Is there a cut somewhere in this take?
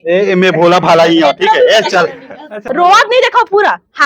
yes; 1 cut; at 2.6 s

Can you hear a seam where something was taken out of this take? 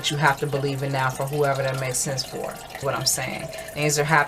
yes; 1 cut; at 2.7 s

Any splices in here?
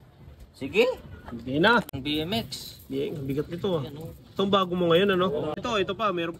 yes; 2 cuts; at 1.9 s, 5.6 s

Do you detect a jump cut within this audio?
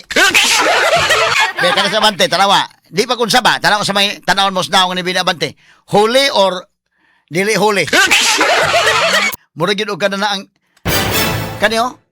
yes; 2 cuts; at 1.3 s, 9.2 s

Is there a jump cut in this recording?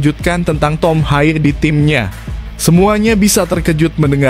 no; 0 cuts

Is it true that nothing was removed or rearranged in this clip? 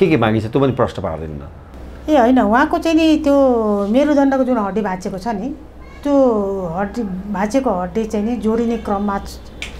yes; 0 cuts

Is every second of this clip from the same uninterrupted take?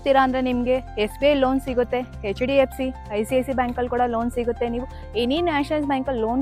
yes; 0 cuts

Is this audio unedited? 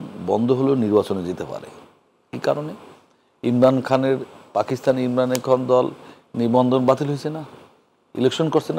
yes; 0 cuts

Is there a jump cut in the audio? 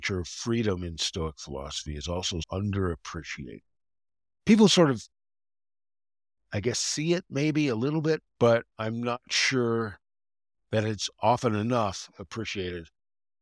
yes; 2 cuts; at 2.5 s, 8.3 s

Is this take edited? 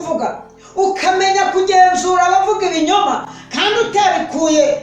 no; 0 cuts

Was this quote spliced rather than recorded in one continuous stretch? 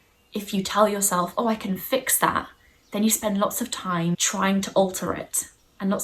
yes; 1 cut; at 4.2 s

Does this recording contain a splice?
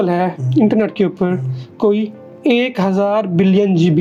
no; 0 cuts

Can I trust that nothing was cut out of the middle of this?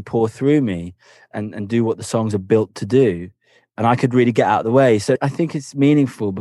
no; 2 cuts; at 1.3 s, 5.2 s

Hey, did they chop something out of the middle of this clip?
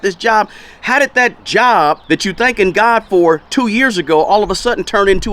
yes; 2 cuts; at 1.4 s, 2.0 s

